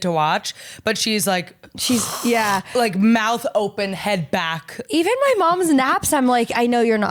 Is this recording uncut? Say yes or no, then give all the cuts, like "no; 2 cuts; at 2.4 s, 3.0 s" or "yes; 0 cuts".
yes; 0 cuts